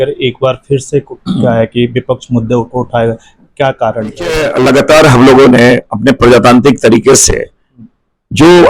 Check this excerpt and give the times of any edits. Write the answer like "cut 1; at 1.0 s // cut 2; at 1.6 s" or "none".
cut 1; at 4.5 s